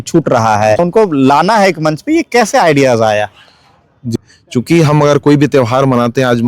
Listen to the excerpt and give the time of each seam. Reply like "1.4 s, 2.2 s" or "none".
0.8 s, 4.1 s

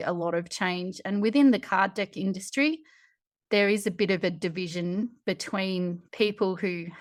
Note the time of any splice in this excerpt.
none

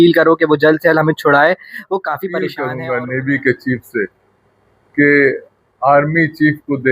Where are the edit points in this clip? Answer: 2.5 s

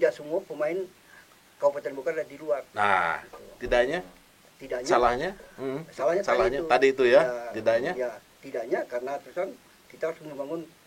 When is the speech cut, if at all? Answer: none

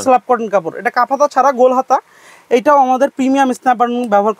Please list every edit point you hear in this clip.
none

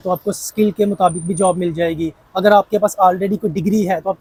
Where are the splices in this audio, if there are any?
none

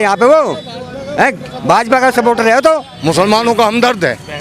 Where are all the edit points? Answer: 2.9 s

